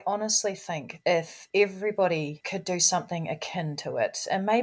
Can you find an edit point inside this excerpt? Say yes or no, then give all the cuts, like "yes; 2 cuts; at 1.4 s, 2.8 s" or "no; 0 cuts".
yes; 2 cuts; at 1.0 s, 2.4 s